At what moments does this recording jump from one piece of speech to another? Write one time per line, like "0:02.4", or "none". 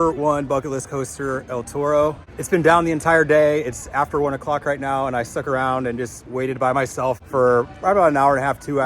none